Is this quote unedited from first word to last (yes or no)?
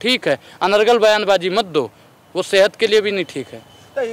yes